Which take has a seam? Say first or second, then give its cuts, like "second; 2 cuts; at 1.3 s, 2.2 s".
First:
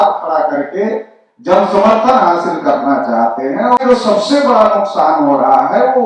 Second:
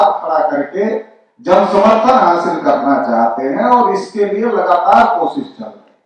first; 1 cut; at 3.8 s